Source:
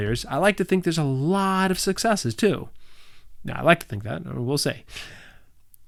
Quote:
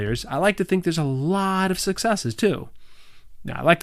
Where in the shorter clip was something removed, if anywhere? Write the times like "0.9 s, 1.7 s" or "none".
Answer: none